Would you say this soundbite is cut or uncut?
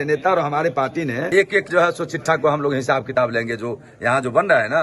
cut